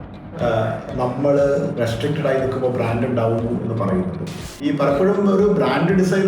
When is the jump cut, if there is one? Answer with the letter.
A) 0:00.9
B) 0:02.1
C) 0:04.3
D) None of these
C